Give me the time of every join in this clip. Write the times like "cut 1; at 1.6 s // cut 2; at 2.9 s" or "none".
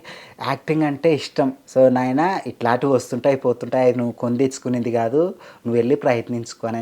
cut 1; at 1.6 s